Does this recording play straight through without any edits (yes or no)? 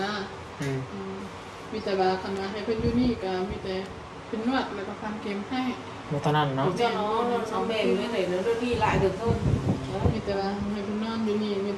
yes